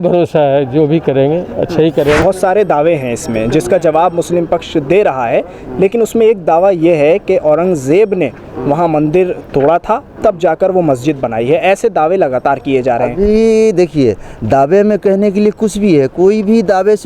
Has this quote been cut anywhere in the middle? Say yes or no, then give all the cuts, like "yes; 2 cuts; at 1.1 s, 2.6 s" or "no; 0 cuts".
yes; 1 cut; at 2.2 s